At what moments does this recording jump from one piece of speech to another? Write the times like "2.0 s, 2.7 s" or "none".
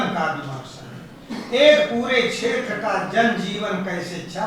none